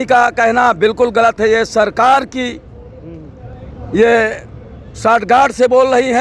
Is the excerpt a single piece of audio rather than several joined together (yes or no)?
yes